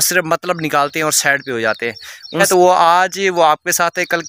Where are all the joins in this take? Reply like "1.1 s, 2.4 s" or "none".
2.4 s